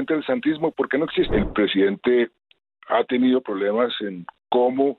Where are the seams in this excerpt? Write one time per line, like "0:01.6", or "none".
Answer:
0:01.3